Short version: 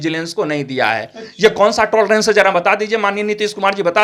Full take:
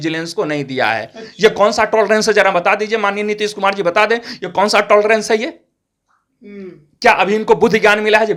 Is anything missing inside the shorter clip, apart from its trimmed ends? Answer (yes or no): no